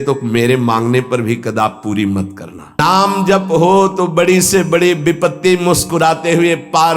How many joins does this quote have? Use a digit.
1